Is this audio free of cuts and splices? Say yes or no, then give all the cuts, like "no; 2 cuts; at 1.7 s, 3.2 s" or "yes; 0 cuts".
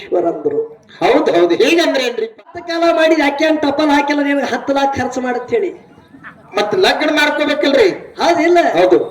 no; 1 cut; at 2.4 s